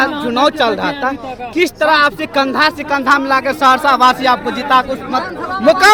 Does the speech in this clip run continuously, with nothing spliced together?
yes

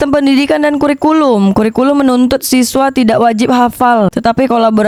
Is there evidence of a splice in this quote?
no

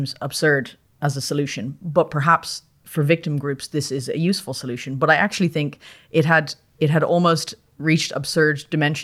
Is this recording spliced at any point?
no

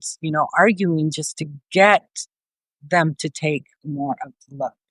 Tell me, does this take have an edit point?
no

